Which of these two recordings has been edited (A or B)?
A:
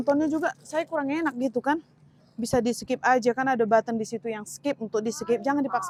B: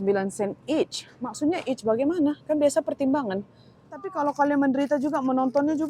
B